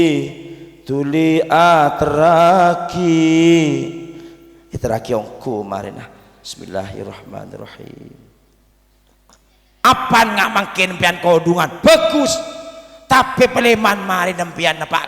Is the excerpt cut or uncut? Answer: cut